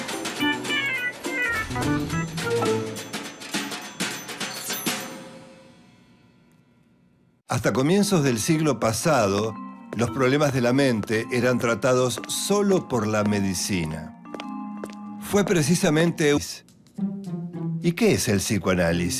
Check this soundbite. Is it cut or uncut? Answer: uncut